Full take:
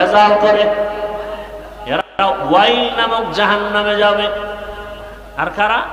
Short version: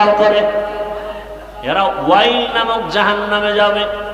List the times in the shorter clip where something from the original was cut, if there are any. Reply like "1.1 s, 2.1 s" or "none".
1.8 s